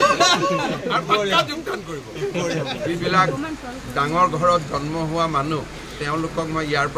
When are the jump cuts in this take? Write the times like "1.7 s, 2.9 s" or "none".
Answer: 2.7 s